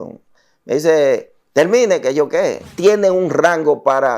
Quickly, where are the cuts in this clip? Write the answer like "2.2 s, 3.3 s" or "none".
2.7 s